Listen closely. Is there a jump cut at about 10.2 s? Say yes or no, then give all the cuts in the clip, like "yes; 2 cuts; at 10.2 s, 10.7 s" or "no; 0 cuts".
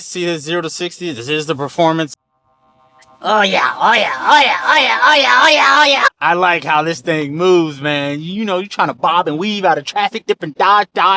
yes; 2 cuts; at 6.1 s, 10.2 s